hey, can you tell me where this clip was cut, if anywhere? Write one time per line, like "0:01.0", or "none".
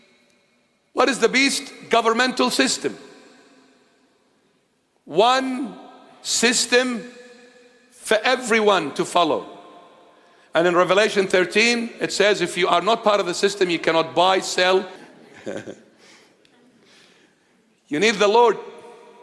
0:15.1